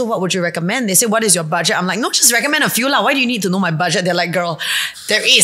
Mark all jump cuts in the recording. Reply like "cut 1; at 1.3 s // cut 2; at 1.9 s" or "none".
none